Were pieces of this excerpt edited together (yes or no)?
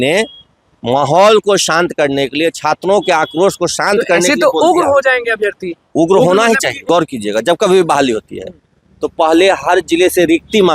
yes